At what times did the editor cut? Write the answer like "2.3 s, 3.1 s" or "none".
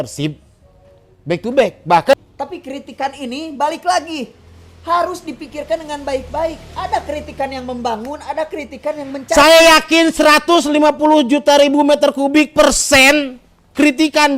2.1 s